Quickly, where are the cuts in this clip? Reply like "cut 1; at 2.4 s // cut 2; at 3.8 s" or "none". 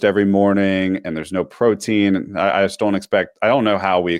none